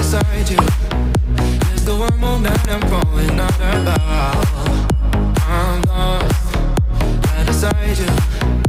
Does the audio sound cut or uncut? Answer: uncut